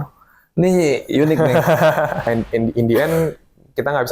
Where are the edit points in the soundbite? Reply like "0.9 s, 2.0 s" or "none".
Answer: 2.3 s

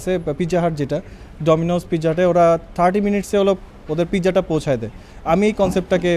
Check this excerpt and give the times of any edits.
none

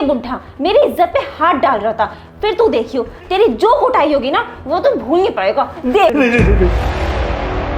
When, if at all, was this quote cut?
6.7 s

